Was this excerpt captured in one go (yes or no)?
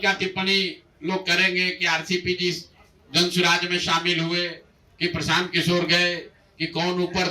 yes